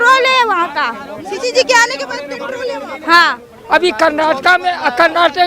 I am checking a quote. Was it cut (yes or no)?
yes